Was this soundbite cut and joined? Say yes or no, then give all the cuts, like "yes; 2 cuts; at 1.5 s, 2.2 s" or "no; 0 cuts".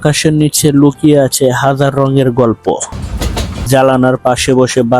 yes; 1 cut; at 3.5 s